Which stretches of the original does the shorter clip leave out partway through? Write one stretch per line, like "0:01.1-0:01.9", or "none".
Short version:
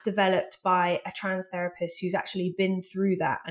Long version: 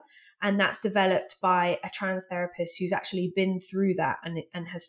none